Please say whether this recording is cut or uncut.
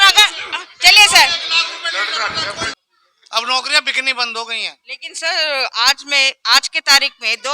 cut